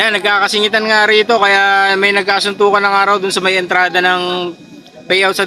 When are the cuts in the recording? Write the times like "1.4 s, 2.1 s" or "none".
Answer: none